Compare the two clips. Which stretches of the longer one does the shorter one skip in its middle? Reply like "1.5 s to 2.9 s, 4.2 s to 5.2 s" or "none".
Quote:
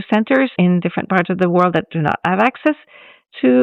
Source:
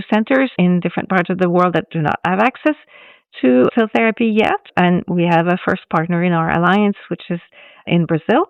none